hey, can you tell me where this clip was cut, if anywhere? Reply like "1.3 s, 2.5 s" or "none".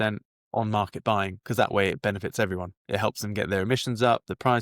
2.7 s